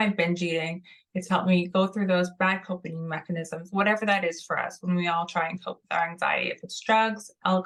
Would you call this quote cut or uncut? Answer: uncut